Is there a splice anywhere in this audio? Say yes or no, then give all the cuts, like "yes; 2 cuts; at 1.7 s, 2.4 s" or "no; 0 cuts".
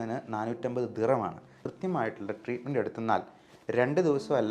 yes; 1 cut; at 1.5 s